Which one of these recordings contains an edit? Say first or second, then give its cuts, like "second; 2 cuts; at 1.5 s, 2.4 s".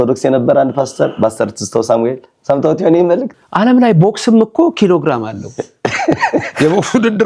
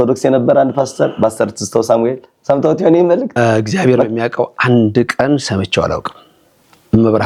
first; 1 cut; at 3.3 s